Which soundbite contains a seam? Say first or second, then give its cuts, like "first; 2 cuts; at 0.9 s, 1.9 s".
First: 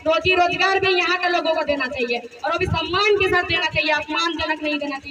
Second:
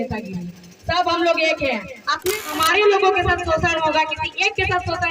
second; 1 cut; at 2.4 s